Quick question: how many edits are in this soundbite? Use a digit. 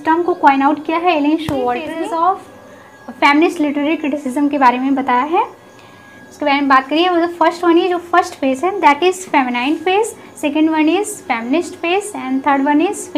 1